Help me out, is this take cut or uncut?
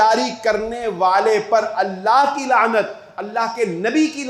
uncut